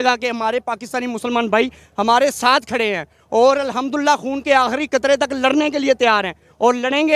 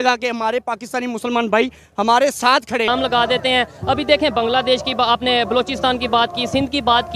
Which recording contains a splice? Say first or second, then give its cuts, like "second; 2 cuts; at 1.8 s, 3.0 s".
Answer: second; 1 cut; at 2.9 s